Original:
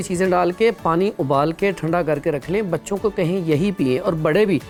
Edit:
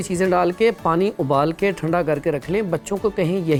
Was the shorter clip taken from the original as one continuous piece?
yes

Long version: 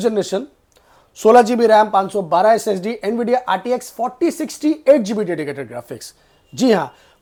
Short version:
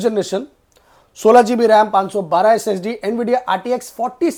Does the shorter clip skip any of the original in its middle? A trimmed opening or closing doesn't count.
no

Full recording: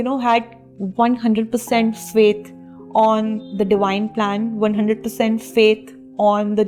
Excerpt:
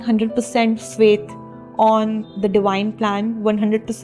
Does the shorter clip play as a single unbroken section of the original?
yes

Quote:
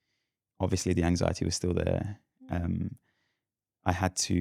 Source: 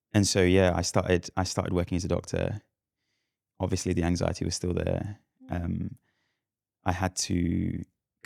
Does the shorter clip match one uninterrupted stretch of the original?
yes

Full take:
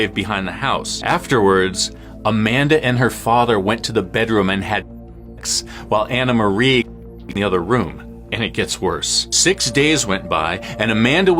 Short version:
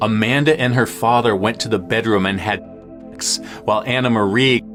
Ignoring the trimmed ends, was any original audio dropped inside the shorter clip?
no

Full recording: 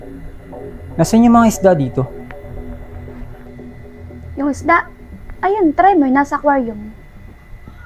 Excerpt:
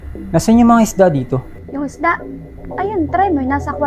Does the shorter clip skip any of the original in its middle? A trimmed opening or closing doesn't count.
yes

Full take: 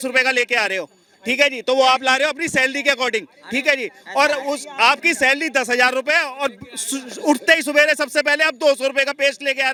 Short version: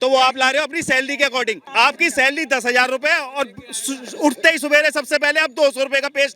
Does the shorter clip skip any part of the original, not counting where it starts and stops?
yes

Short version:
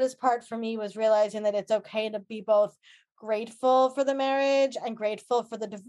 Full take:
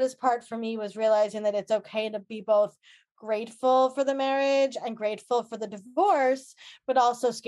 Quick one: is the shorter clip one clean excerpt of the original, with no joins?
yes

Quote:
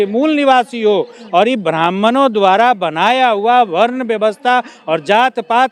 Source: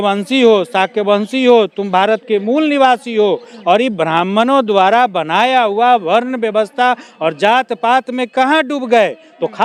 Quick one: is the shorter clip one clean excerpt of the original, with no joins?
yes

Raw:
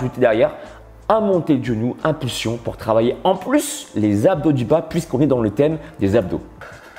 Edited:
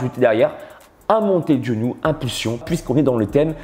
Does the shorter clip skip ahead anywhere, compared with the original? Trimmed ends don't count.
yes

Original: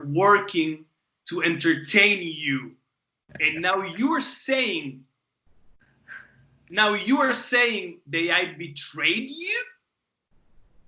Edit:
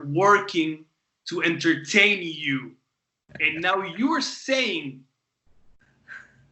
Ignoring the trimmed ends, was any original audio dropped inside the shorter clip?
no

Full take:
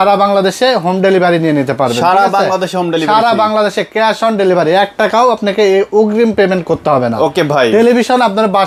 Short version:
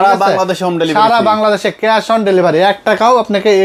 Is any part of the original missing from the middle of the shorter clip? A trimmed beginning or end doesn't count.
no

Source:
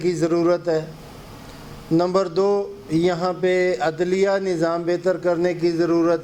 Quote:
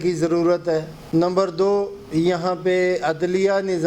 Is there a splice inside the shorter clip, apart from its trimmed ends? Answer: yes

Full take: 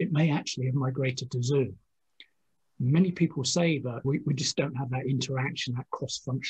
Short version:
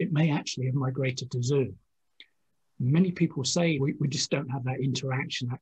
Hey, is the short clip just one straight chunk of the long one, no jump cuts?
no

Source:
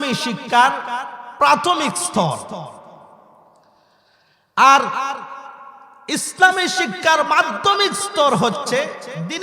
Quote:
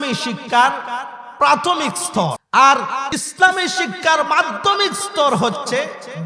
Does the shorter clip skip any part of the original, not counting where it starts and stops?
yes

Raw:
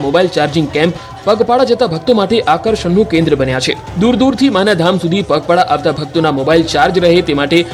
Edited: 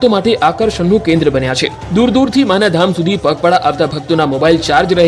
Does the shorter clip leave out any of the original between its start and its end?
no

